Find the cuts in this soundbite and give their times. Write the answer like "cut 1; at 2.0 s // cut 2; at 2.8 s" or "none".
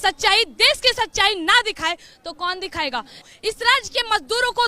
cut 1; at 3.2 s